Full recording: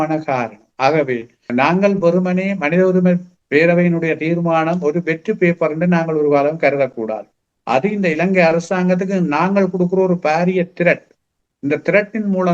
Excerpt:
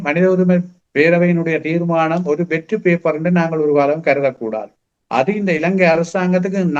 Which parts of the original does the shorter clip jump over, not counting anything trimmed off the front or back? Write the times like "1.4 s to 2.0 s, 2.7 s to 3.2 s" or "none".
none